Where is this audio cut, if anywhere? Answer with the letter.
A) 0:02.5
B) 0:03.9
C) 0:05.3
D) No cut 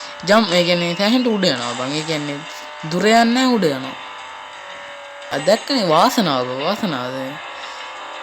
C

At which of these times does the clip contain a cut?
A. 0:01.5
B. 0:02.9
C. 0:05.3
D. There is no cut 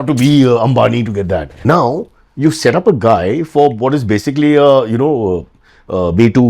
A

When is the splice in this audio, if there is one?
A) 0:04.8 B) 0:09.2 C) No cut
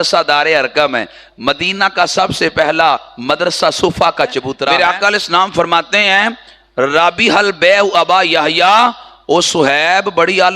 A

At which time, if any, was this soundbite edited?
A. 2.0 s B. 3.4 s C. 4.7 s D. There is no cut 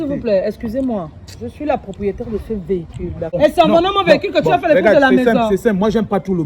B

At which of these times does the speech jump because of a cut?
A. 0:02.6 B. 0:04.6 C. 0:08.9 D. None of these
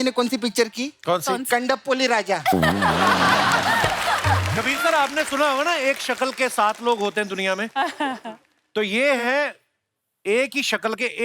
B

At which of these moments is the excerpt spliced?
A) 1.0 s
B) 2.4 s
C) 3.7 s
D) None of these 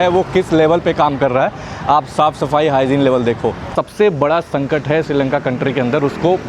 C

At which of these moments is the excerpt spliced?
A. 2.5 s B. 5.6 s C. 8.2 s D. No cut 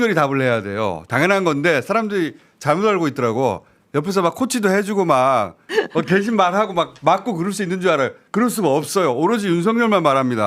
B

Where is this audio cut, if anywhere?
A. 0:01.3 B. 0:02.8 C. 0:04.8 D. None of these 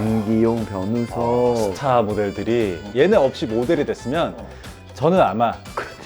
B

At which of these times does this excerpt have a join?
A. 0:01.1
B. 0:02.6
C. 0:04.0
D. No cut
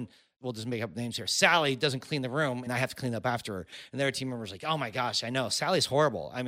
B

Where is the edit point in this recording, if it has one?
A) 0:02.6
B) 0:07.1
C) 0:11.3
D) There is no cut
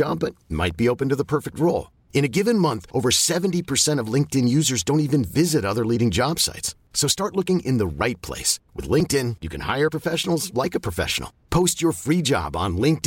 D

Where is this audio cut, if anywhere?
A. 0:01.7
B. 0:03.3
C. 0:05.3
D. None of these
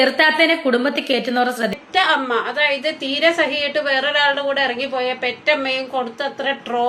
A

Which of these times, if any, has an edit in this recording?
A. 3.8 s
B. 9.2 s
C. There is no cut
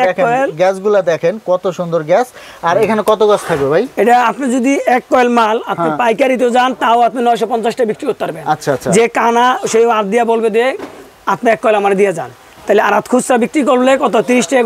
C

